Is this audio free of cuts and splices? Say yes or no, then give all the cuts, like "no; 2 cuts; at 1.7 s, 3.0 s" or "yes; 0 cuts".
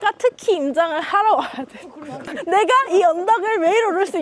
no; 1 cut; at 2.3 s